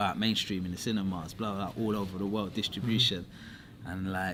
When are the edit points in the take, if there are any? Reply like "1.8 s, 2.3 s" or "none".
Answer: none

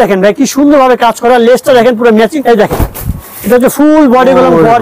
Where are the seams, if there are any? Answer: 2.3 s

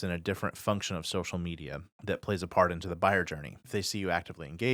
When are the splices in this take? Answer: 1.9 s, 3.6 s

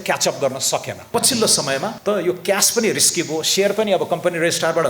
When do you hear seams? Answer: 1.1 s, 2.0 s

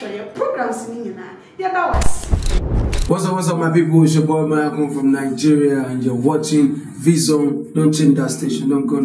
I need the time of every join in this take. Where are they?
3.1 s

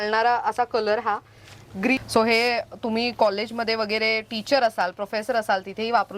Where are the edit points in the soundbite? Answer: 2.0 s

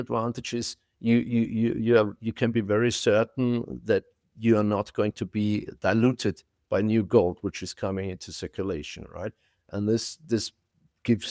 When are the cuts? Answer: none

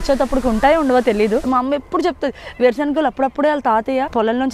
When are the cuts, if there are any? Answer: 1.4 s

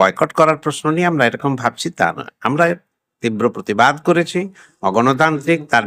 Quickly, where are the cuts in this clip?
none

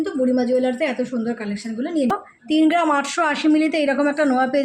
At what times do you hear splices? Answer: 2.1 s

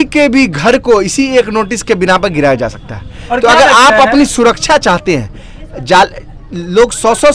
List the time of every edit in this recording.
none

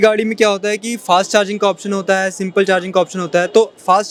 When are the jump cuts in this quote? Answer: none

